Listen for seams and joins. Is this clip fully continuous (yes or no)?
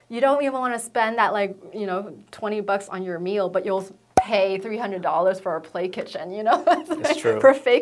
yes